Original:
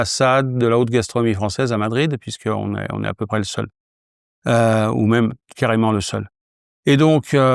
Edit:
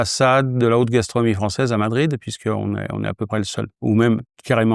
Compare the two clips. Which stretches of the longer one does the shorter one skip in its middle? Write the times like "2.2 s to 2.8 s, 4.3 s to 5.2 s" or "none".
3.8 s to 4.9 s